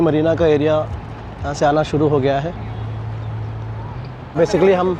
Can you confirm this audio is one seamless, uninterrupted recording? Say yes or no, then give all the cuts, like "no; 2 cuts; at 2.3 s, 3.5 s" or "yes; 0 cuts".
yes; 0 cuts